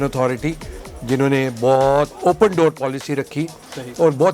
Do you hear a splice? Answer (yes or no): yes